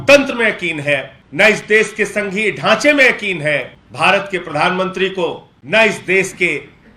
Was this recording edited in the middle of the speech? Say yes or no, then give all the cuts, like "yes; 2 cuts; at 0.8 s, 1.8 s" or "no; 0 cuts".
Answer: yes; 3 cuts; at 1.2 s, 3.8 s, 5.5 s